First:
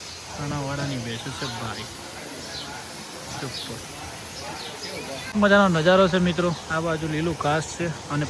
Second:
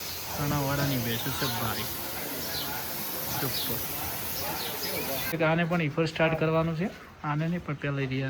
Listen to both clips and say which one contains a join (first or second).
second